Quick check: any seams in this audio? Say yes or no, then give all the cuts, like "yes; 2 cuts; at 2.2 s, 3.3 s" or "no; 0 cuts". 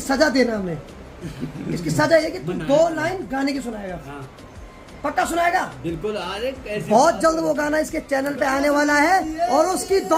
no; 0 cuts